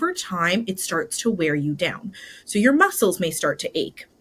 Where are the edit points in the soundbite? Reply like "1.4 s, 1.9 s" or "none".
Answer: none